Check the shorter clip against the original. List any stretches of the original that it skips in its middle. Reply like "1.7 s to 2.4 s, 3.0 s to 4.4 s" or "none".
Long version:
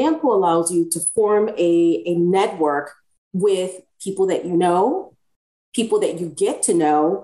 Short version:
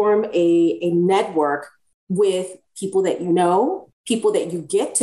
5.1 s to 5.6 s